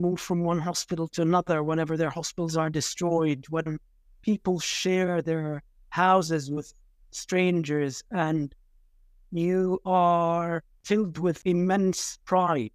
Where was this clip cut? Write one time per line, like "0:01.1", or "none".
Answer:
0:10.7
0:11.4